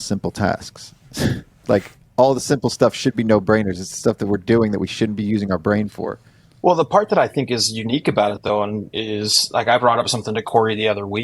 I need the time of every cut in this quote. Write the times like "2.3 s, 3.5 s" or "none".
none